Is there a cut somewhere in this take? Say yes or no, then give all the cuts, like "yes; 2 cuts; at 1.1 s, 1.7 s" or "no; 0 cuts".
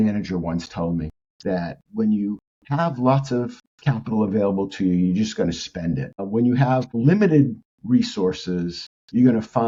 no; 0 cuts